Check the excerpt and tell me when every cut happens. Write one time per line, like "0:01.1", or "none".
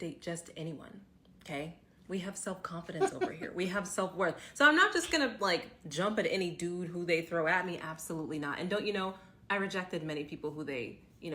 0:04.1